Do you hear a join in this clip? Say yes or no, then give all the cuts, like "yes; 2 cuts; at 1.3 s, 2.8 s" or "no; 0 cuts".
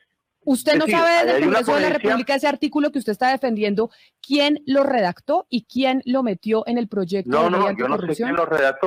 no; 0 cuts